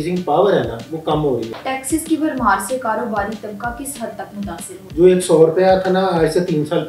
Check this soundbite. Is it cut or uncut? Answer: cut